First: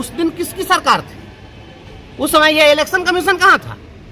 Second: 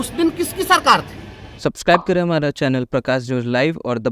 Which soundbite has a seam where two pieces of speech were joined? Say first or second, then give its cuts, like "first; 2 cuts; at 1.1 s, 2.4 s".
second; 1 cut; at 1.6 s